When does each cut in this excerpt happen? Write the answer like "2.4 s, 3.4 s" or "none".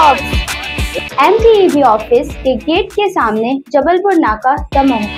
none